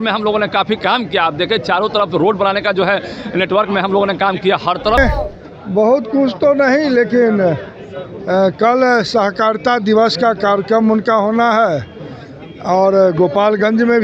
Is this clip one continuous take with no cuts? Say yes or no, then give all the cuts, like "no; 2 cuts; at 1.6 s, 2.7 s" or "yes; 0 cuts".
no; 1 cut; at 5.0 s